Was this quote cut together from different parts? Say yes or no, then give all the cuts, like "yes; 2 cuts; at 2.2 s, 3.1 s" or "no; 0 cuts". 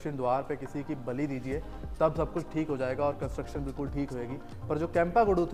no; 0 cuts